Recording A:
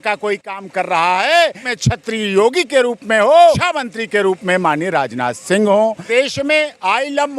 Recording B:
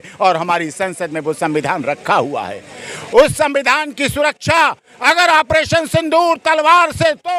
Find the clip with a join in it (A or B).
A